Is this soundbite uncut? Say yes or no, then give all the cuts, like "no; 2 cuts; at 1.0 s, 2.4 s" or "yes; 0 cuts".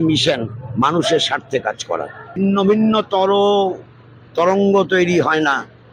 no; 1 cut; at 2.4 s